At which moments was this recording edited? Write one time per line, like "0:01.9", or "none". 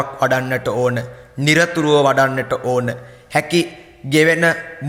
none